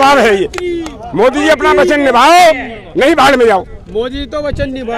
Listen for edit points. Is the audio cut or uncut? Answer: uncut